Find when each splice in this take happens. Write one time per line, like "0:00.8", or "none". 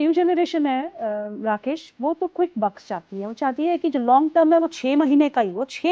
none